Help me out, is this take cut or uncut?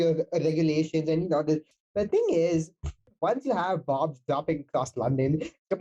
cut